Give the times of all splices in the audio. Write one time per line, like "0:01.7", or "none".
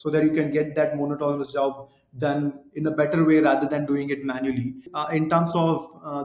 0:04.9